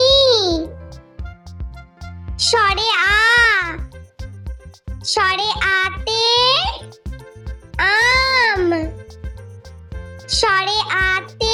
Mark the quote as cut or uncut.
uncut